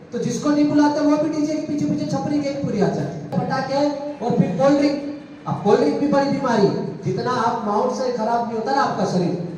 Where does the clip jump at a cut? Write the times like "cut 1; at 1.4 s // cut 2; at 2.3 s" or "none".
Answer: cut 1; at 3.3 s